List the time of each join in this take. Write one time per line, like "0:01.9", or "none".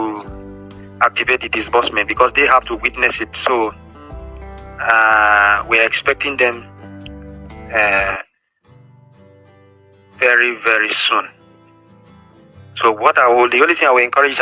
none